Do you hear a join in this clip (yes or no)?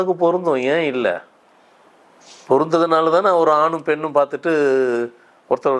no